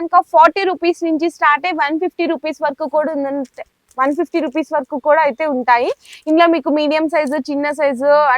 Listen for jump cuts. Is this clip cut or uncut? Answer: uncut